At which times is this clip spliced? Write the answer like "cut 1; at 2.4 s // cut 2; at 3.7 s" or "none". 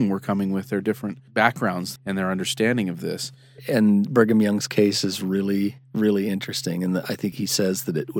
cut 1; at 1.2 s // cut 2; at 1.9 s // cut 3; at 7.4 s

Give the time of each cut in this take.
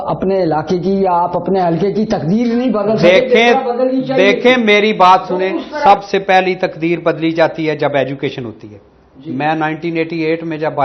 none

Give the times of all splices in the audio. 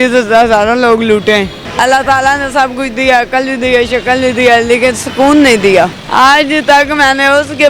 cut 1; at 1.6 s // cut 2; at 6.0 s

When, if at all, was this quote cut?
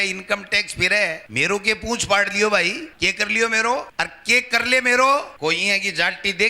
cut 1; at 1.2 s // cut 2; at 2.9 s // cut 3; at 3.9 s // cut 4; at 5.3 s

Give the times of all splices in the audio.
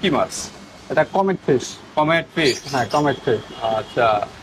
none

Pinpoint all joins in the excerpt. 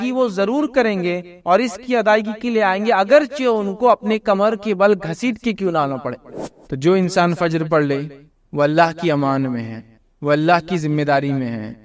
cut 1; at 6.3 s

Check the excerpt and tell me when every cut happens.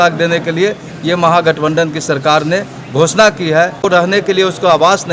cut 1; at 4.1 s

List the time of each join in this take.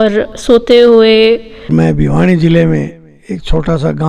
cut 1; at 1.5 s

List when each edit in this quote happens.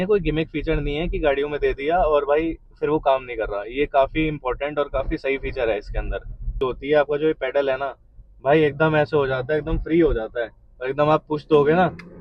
cut 1; at 6.5 s

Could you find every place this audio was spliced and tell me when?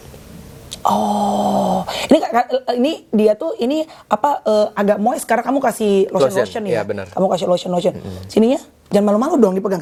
none

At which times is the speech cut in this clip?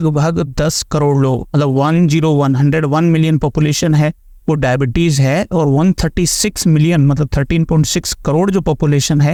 none

